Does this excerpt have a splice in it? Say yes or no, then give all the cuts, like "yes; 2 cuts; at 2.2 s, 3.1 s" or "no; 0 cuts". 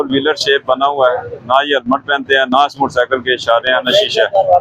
no; 0 cuts